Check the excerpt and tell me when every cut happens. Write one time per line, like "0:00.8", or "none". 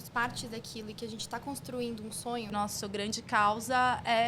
0:02.5